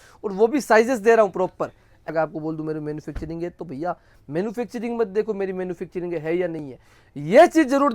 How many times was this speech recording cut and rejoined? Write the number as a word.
one